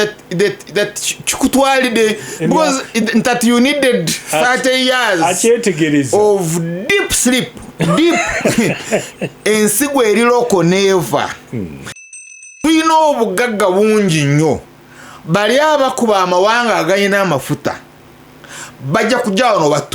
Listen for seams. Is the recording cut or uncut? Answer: cut